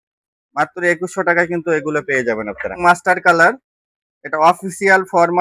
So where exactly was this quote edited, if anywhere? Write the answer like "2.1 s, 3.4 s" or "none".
2.8 s